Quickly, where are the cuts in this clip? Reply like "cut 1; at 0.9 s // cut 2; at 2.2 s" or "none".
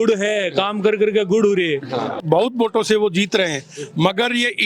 cut 1; at 2.1 s